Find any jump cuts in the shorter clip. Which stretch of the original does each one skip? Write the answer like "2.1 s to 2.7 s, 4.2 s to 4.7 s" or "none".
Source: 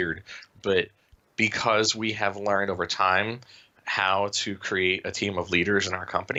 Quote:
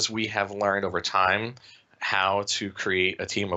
none